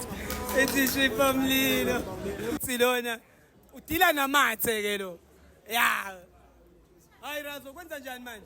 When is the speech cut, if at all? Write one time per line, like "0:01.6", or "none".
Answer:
0:02.6